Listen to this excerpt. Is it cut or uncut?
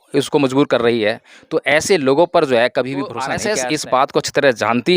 cut